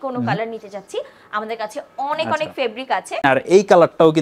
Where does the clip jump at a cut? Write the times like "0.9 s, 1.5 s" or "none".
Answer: 3.2 s